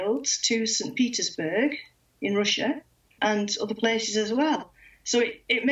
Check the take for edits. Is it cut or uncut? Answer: cut